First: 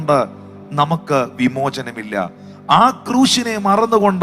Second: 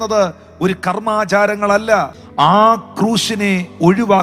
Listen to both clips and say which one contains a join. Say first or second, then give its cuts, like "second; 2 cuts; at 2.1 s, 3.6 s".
second; 1 cut; at 2.2 s